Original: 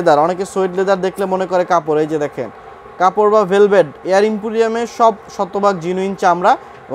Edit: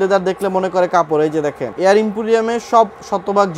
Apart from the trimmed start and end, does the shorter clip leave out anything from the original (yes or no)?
yes